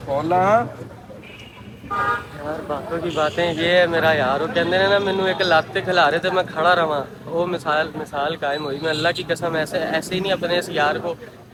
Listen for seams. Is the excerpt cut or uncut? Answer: uncut